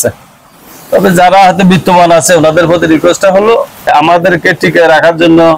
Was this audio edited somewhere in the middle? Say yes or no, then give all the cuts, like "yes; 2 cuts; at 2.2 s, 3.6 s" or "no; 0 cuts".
yes; 1 cut; at 3.9 s